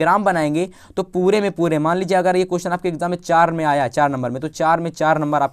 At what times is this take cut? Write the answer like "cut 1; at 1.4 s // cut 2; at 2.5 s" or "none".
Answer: none